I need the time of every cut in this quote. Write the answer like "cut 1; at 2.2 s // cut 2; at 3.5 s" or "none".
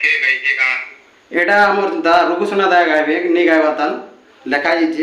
cut 1; at 4.1 s